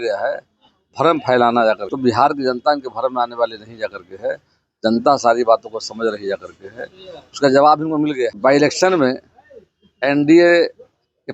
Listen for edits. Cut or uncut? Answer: cut